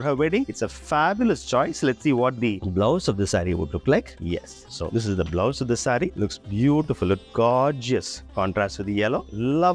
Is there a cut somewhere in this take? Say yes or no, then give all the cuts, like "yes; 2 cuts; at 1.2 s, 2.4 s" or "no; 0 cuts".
no; 0 cuts